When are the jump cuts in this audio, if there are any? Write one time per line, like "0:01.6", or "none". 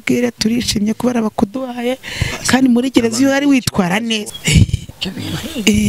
0:04.3